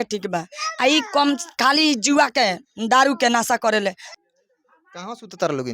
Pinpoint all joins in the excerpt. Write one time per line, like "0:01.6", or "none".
0:04.0